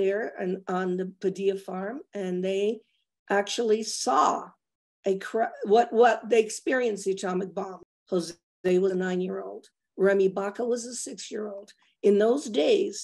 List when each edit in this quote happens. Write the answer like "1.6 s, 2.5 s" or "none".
7.8 s

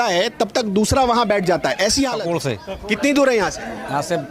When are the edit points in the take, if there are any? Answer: 2.2 s

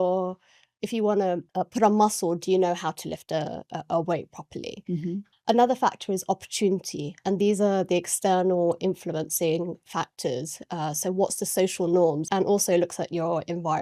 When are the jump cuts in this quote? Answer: 1.5 s, 5.3 s, 12.2 s

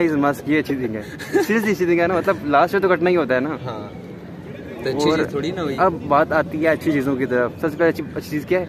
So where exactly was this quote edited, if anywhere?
none

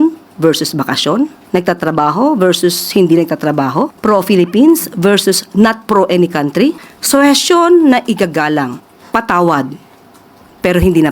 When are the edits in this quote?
1.4 s, 4.0 s, 6.9 s, 8.9 s

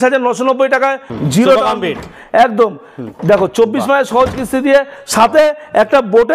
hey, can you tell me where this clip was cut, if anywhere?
1.1 s

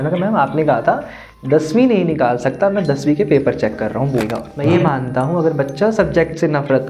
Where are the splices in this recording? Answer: 4.2 s

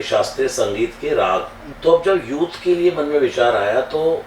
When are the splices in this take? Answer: 1.6 s

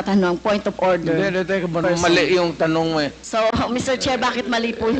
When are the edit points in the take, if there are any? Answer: 1.8 s, 3.2 s

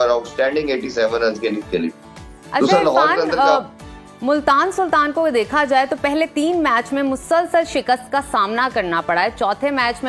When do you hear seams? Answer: none

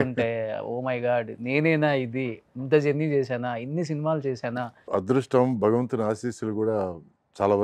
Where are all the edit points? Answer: 4.8 s

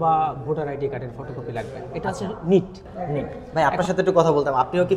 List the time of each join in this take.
3.4 s

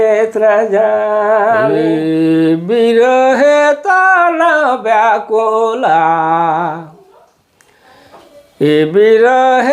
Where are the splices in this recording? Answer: 1.8 s

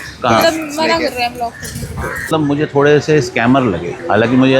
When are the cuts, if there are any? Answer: 2.2 s

